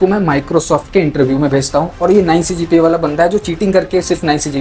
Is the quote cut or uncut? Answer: uncut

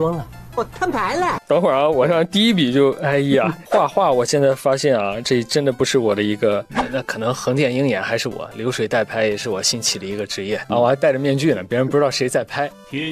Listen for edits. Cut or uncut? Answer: cut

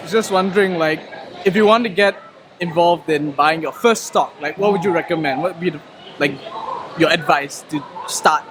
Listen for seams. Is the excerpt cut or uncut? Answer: uncut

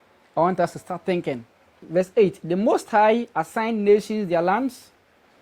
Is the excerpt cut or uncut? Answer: cut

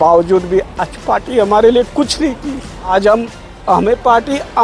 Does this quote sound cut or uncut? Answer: cut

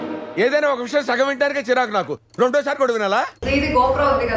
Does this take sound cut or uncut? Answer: cut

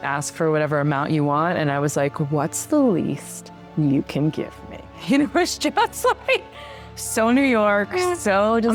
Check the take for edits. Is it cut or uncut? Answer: uncut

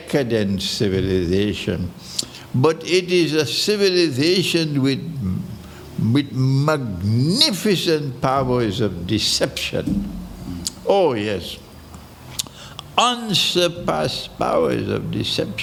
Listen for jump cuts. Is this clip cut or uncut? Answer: uncut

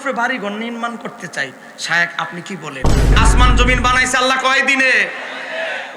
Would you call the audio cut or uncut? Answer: cut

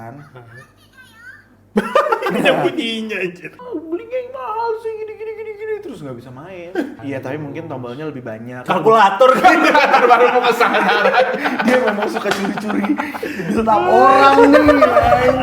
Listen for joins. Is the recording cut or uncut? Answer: cut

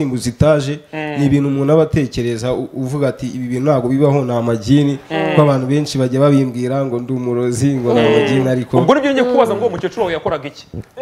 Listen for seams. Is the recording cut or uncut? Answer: uncut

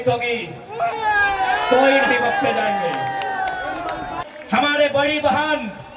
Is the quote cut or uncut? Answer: cut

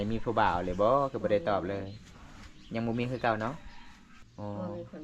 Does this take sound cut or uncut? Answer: cut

